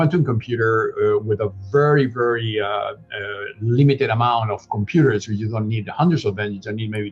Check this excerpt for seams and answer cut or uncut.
uncut